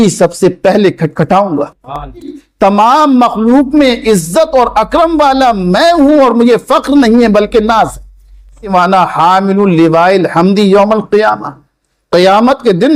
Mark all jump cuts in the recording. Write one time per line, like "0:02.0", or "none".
0:02.4
0:08.7